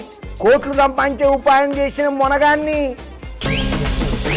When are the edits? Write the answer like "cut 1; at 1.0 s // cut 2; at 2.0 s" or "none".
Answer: cut 1; at 3.2 s